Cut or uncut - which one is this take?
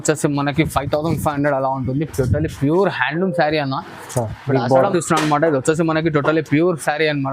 cut